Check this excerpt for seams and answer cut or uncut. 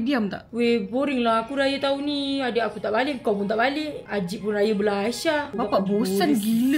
uncut